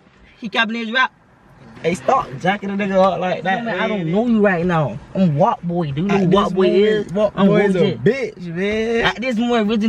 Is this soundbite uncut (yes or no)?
no